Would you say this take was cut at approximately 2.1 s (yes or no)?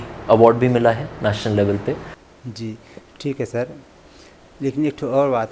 yes